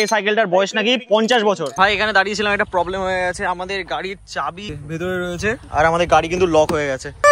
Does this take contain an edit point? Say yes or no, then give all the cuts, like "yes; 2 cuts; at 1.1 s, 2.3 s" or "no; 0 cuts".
yes; 2 cuts; at 1.7 s, 4.7 s